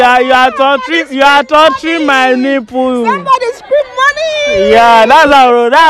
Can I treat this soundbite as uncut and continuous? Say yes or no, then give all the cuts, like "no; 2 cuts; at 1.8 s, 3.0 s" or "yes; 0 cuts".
yes; 0 cuts